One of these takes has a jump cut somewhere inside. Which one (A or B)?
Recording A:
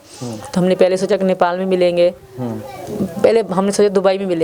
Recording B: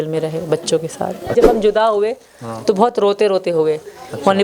B